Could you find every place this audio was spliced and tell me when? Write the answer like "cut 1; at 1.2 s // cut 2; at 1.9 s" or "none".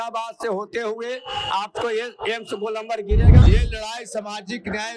cut 1; at 3.4 s

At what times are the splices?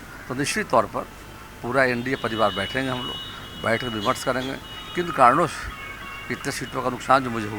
none

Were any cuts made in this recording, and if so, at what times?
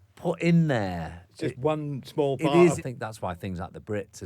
cut 1; at 2.8 s

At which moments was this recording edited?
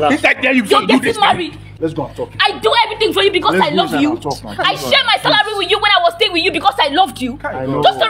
cut 1; at 1.7 s

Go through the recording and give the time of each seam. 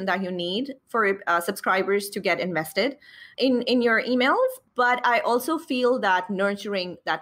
cut 1; at 3.3 s // cut 2; at 4.6 s

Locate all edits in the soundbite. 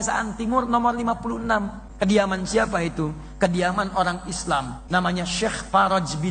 cut 1; at 1.8 s // cut 2; at 4.8 s

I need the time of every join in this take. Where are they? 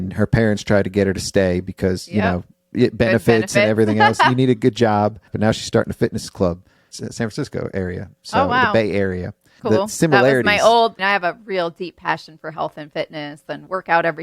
cut 1; at 5.2 s // cut 2; at 6.8 s // cut 3; at 9.5 s // cut 4; at 11.0 s

